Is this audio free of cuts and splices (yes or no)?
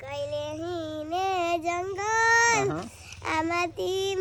yes